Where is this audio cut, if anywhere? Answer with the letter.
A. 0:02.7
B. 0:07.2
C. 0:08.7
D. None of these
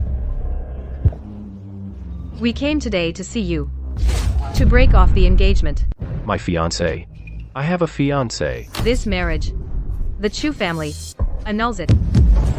C